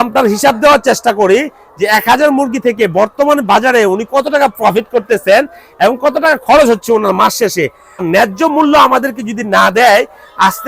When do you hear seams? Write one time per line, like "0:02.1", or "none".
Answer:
0:08.1